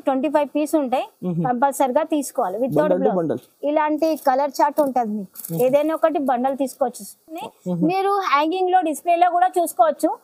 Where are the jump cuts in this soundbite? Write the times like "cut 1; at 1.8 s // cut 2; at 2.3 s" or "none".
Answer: cut 1; at 7.5 s